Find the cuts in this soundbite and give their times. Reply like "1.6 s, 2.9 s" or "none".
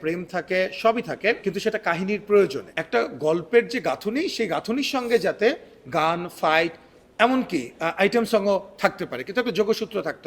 1.4 s, 2.7 s